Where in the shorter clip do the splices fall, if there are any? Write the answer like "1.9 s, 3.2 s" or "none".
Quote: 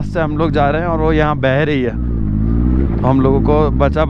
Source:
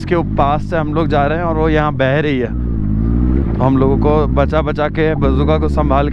none